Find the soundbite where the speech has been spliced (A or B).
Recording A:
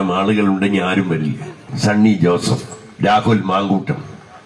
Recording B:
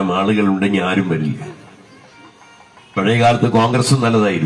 A